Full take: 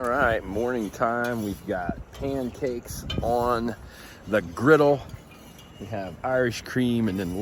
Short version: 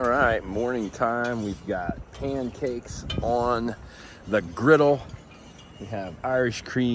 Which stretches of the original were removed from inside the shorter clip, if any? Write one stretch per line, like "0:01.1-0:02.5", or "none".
none